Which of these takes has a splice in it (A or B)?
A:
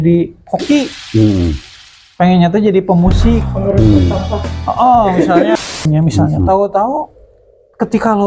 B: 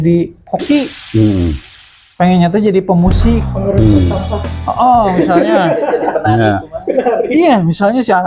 A